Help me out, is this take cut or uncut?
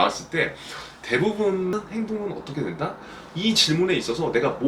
cut